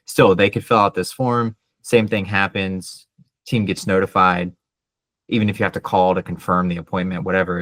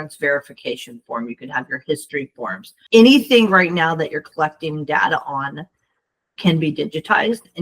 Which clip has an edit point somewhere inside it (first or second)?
second